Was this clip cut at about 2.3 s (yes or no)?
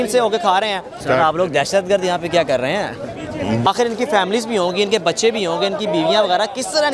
no